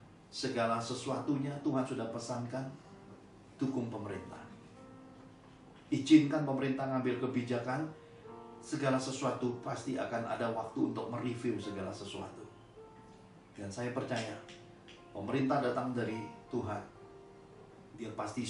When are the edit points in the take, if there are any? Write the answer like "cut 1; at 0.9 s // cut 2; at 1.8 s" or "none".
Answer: none